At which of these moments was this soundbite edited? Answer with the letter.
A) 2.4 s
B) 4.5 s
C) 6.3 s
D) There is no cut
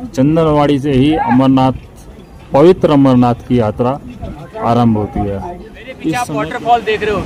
C